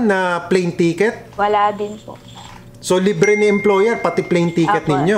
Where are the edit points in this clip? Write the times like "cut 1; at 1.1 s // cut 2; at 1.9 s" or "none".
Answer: cut 1; at 1.2 s